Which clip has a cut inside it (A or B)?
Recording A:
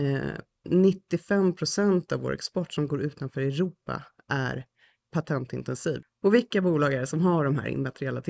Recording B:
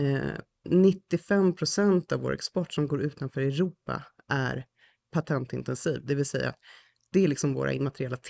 A